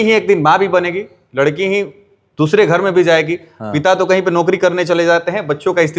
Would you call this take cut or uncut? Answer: uncut